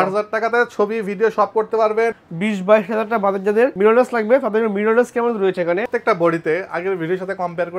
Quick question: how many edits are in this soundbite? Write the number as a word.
two